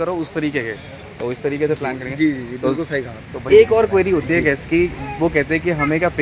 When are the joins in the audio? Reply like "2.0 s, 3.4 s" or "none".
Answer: 3.4 s